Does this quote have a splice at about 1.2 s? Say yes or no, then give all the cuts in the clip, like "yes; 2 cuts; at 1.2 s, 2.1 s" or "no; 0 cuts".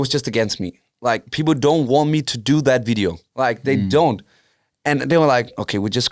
no; 1 cut; at 3.2 s